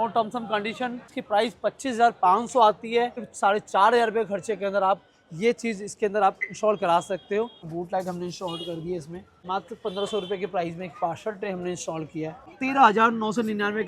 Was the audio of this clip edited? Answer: yes; 5 cuts; at 1.1 s, 3.2 s, 7.6 s, 9.3 s, 12.5 s

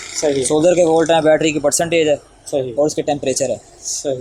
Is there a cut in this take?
no; 0 cuts

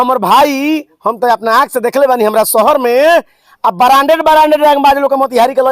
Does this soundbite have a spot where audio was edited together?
no; 0 cuts

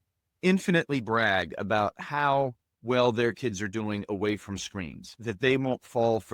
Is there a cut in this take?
yes; 1 cut; at 5.1 s

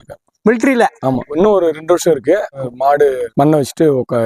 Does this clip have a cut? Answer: yes; 1 cut; at 2.6 s

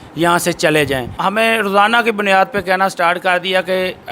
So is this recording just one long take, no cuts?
no; 1 cut; at 1.2 s

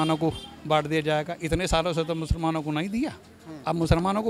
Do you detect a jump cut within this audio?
no; 0 cuts

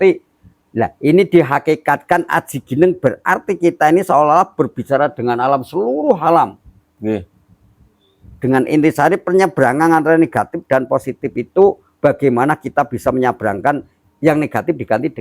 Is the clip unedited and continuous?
no; 1 cut; at 13.9 s

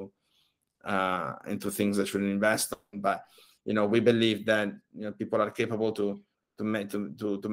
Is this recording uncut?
yes; 0 cuts

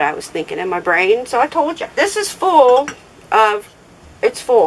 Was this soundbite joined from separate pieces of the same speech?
no; 0 cuts

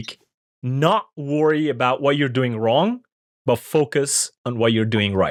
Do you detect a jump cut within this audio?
no; 0 cuts

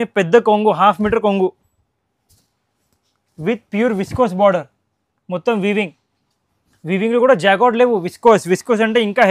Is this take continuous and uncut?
yes; 0 cuts

